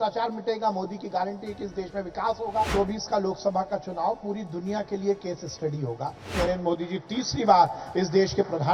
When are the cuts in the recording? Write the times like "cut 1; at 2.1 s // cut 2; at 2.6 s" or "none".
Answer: cut 1; at 2.7 s // cut 2; at 6.4 s